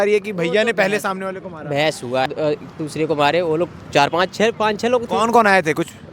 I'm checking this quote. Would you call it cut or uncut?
cut